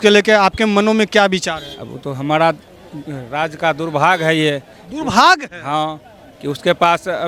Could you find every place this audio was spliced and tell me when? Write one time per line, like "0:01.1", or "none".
none